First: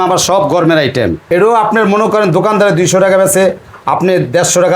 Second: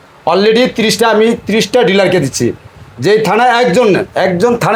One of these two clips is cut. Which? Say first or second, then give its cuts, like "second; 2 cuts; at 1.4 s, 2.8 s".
first; 1 cut; at 1.2 s